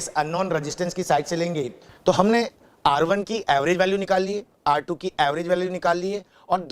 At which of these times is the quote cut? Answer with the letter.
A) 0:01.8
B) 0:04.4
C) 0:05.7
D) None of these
A